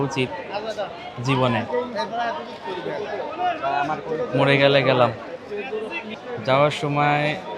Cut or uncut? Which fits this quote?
cut